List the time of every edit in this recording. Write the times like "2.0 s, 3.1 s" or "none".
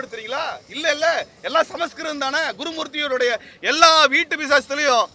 none